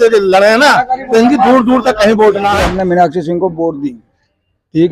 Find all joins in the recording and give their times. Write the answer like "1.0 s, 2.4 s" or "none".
2.6 s

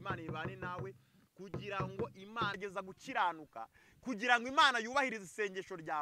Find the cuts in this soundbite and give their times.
2.6 s

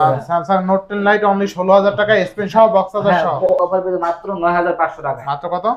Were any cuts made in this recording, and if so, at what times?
3.5 s

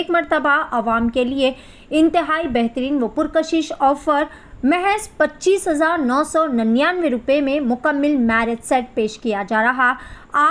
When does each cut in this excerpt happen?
none

